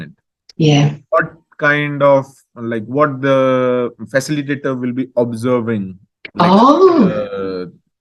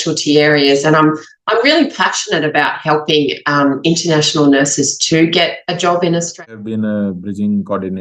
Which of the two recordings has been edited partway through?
second; 1 cut; at 6.5 s

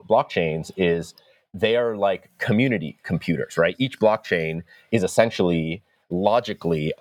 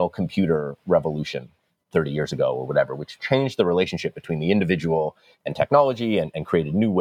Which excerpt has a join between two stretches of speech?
second; 2 cuts; at 1.9 s, 3.1 s

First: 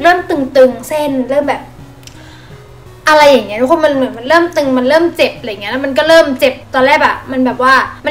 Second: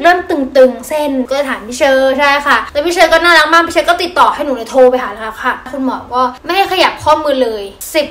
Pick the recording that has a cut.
second; 2 cuts; at 1.2 s, 5.7 s

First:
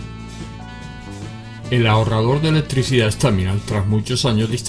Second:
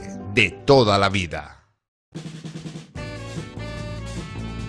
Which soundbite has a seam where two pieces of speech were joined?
second; 1 cut; at 2.1 s

